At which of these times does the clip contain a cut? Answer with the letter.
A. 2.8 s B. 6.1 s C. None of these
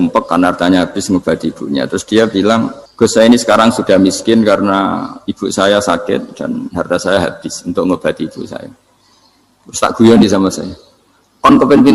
A